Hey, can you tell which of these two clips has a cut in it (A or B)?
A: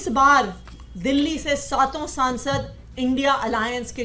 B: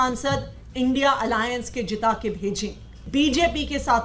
B